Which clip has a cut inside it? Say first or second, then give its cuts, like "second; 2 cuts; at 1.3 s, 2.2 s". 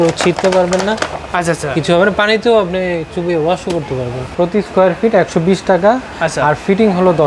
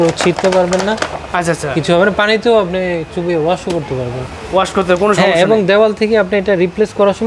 first; 1 cut; at 4.3 s